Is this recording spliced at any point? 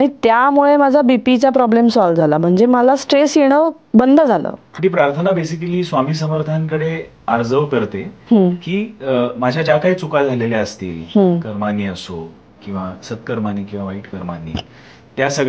yes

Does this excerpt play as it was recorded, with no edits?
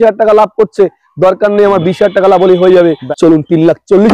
no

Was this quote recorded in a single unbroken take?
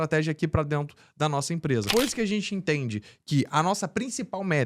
no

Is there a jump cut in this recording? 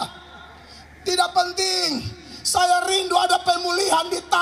no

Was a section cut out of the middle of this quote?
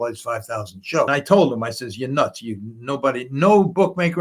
yes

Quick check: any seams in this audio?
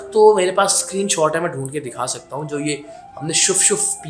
no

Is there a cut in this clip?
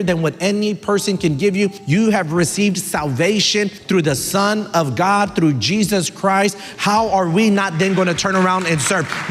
yes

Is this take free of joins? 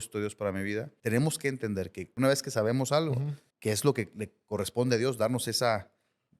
no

